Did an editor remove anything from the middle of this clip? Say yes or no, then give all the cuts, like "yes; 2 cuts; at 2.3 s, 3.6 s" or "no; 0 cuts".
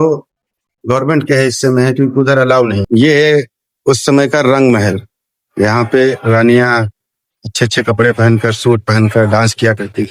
yes; 1 cut; at 2.8 s